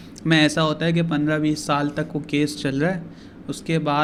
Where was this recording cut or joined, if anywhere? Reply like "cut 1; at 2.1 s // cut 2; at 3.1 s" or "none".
none